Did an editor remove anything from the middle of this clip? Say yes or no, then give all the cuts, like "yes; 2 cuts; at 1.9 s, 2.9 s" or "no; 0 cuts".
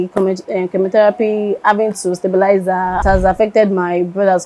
yes; 1 cut; at 3.0 s